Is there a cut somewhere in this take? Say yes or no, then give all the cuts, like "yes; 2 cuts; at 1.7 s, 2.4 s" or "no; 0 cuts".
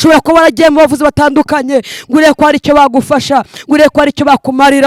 no; 0 cuts